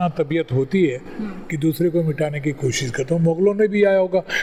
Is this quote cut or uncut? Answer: uncut